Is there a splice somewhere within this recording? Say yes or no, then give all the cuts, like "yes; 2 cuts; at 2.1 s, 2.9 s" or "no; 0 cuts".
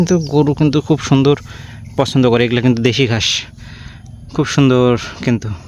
no; 0 cuts